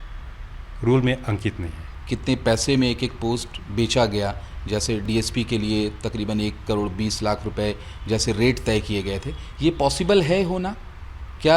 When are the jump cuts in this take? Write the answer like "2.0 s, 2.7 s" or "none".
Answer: 1.9 s